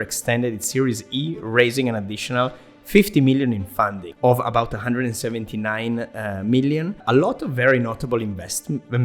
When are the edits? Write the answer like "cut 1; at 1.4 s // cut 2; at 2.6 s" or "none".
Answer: cut 1; at 4.0 s // cut 2; at 7.0 s

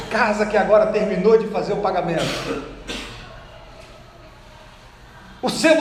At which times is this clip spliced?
none

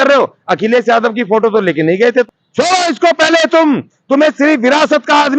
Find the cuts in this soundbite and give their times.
cut 1; at 2.3 s

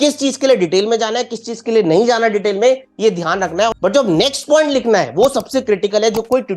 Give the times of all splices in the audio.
cut 1; at 3.8 s

